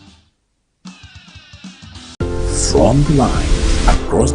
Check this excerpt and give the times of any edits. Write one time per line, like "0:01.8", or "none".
0:01.3